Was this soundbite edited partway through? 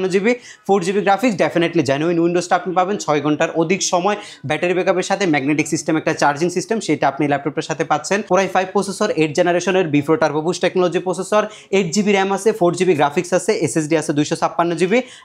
yes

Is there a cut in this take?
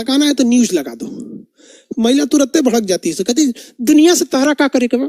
no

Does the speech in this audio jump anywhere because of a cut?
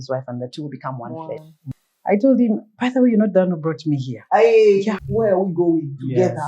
yes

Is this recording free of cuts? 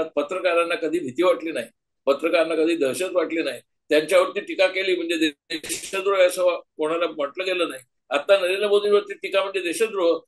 yes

